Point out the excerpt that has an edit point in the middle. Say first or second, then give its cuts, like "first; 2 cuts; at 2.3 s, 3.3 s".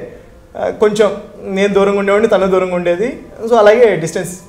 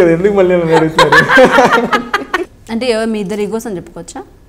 second; 1 cut; at 2.6 s